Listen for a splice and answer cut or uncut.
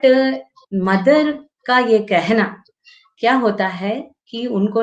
uncut